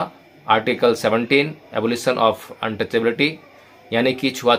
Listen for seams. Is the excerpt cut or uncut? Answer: uncut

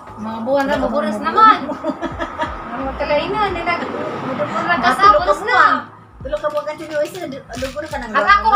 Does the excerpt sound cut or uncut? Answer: uncut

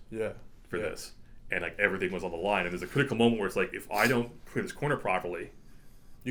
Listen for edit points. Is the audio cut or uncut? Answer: uncut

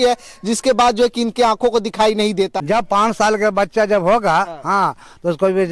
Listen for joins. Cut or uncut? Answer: cut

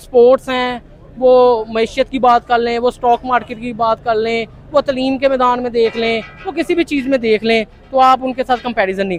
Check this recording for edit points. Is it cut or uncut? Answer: uncut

